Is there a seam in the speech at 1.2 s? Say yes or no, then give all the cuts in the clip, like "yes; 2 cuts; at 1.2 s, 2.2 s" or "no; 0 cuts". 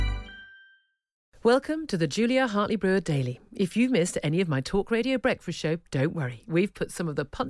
yes; 1 cut; at 1.2 s